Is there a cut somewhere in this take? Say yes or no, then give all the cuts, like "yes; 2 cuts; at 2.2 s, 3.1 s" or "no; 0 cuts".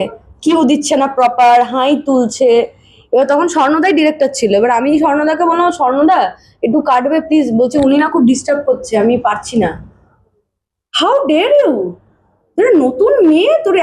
no; 0 cuts